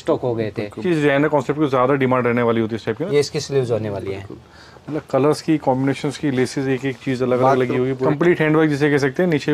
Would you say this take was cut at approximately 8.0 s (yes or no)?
yes